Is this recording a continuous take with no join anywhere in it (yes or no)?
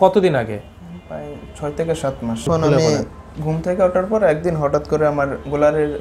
no